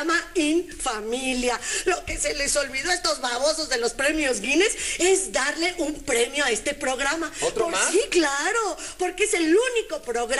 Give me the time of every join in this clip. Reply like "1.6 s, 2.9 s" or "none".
9.2 s

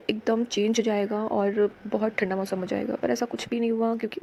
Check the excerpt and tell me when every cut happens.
none

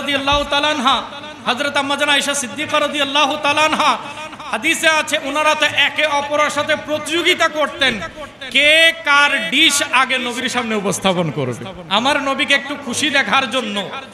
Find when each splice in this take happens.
11.7 s

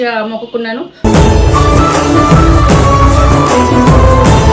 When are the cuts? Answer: none

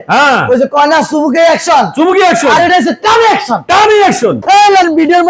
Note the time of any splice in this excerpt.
4.4 s

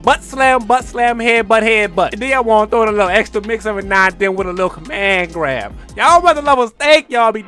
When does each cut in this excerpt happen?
2.2 s

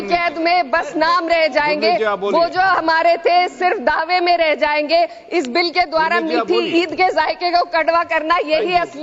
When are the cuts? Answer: none

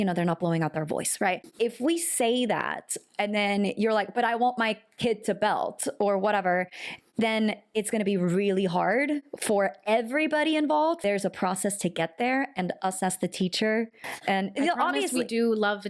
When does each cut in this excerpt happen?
1.5 s, 11.0 s, 14.0 s

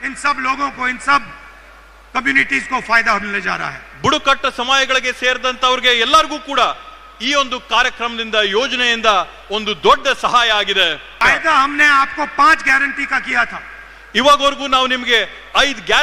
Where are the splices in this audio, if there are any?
none

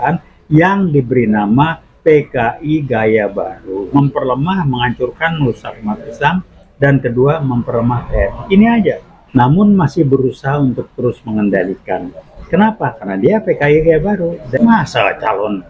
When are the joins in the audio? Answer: 3.9 s, 9.1 s, 14.4 s

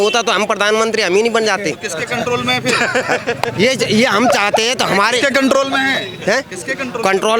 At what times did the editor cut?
none

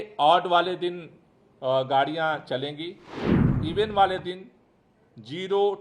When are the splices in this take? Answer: 3.5 s

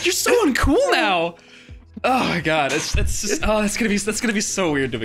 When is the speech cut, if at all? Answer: none

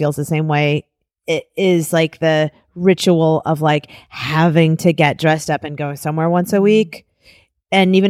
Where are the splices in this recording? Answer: none

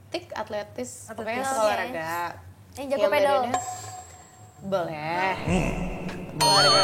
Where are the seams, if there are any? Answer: none

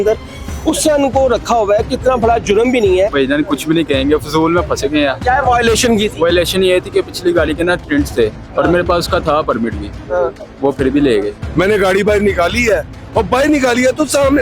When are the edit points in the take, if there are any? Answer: 3.1 s, 5.2 s, 11.4 s

